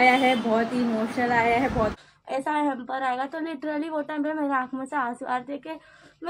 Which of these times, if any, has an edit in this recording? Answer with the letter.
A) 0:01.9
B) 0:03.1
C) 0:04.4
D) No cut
A